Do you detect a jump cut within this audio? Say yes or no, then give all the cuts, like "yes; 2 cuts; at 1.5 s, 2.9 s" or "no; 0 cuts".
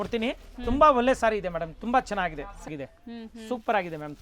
yes; 1 cut; at 2.8 s